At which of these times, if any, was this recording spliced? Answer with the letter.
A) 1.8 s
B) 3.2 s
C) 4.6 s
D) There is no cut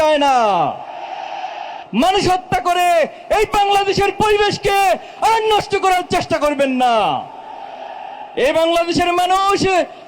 A